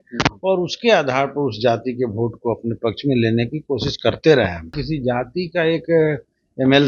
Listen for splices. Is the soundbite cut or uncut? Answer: cut